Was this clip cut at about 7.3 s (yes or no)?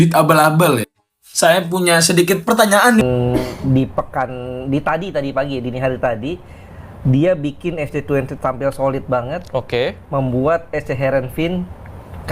no